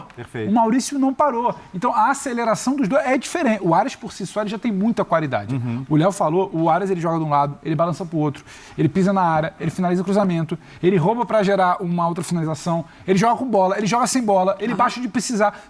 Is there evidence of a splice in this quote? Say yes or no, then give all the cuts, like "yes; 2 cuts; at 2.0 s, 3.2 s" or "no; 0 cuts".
no; 0 cuts